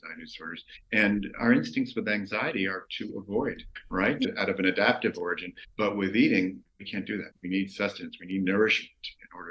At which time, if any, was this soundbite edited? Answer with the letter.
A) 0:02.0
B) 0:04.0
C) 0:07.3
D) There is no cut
C